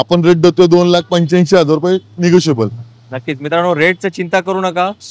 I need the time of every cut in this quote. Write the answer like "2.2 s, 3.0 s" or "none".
none